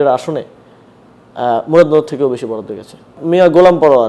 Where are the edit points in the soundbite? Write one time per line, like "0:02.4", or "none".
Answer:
0:03.2